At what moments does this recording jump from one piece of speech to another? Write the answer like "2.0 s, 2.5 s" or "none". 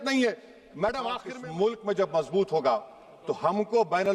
1.3 s